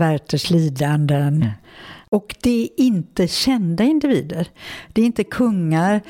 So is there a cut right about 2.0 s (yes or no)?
yes